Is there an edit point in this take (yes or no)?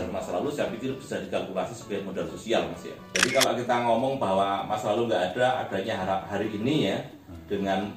yes